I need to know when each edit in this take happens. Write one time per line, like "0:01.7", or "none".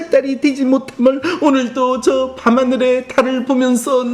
none